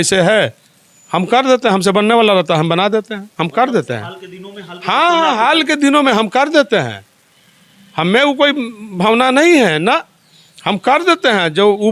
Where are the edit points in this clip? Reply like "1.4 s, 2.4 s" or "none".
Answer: none